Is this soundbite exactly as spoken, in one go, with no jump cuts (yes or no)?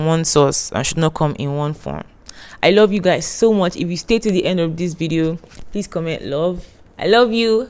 yes